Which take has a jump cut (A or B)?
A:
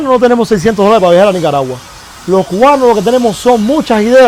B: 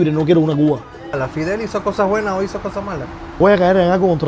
B